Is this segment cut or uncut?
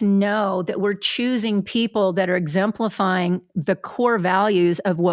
uncut